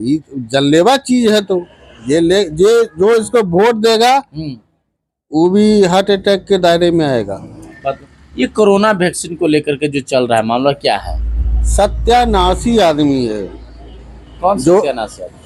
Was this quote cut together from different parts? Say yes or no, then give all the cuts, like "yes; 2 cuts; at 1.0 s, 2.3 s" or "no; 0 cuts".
yes; 1 cut; at 7.6 s